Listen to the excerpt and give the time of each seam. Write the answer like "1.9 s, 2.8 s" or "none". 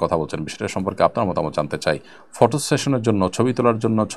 none